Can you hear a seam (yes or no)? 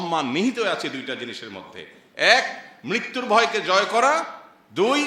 no